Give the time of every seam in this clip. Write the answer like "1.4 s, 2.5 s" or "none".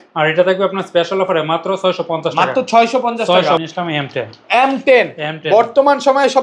3.6 s

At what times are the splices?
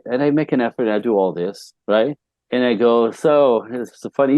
2.3 s

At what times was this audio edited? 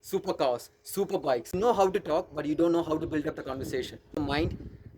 1.6 s, 4.2 s

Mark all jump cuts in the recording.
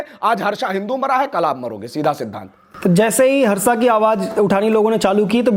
none

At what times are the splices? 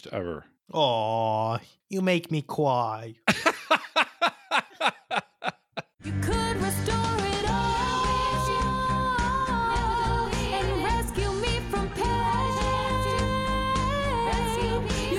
6.0 s

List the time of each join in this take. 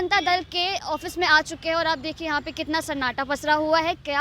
none

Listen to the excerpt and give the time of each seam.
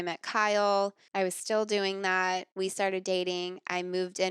1.0 s, 2.5 s

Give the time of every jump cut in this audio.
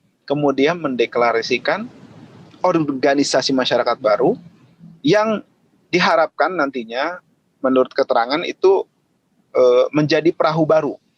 none

